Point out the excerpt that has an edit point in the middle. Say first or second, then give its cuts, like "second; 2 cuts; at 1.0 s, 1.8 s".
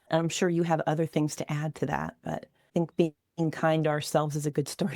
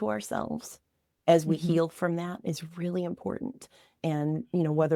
first; 1 cut; at 2.5 s